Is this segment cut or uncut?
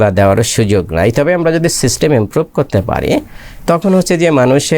uncut